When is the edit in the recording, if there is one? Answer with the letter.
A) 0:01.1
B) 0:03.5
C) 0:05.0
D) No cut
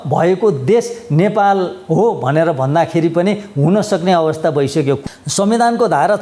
C